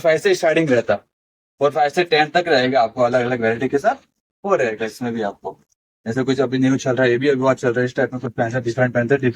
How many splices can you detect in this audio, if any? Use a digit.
0